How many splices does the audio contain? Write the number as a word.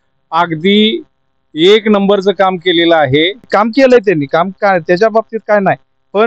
one